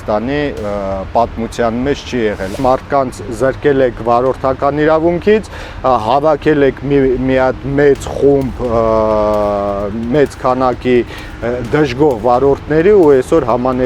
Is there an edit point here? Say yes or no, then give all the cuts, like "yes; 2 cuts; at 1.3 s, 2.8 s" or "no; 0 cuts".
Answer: yes; 1 cut; at 2.6 s